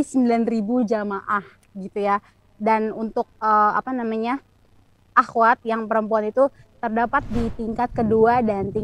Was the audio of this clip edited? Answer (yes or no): no